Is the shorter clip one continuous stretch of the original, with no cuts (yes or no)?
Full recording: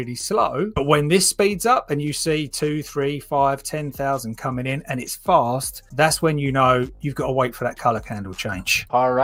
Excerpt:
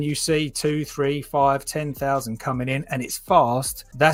yes